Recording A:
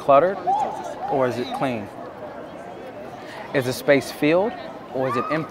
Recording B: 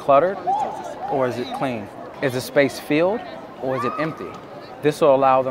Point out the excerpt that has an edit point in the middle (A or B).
B